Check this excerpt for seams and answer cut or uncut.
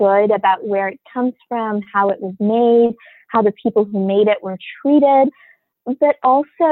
uncut